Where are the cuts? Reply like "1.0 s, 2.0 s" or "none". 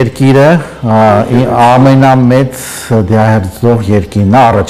none